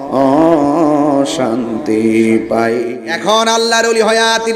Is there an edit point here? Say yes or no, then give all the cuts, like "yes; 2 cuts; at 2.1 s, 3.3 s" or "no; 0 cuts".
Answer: yes; 1 cut; at 2.8 s